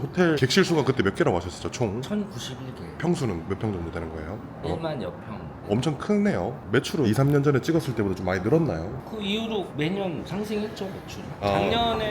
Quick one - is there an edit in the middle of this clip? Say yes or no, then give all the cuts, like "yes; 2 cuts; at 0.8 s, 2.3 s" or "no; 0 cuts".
no; 0 cuts